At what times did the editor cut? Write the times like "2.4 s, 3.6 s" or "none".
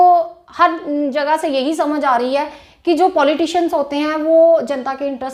none